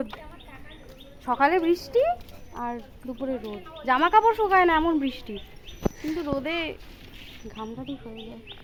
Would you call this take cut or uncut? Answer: uncut